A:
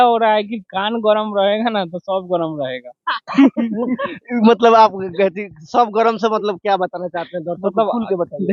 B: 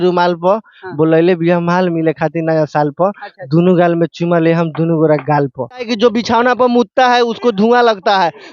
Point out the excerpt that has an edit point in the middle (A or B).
B